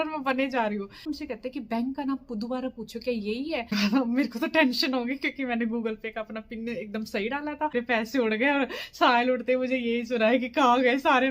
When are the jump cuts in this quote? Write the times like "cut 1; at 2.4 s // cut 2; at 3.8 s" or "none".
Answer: cut 1; at 1.1 s // cut 2; at 3.7 s // cut 3; at 7.7 s